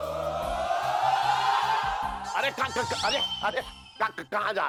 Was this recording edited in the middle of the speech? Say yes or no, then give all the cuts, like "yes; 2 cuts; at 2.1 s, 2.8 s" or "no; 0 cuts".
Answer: no; 0 cuts